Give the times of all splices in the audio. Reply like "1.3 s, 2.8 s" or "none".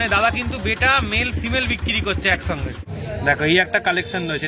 2.8 s

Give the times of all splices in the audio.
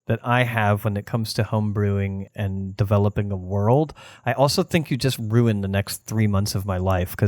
2.3 s

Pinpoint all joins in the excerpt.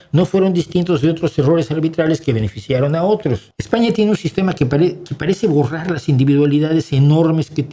3.5 s

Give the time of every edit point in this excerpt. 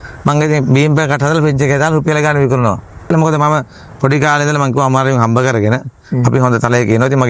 3.1 s

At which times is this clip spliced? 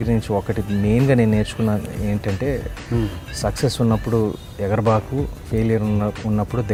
none

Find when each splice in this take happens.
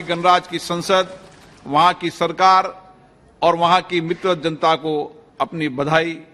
none

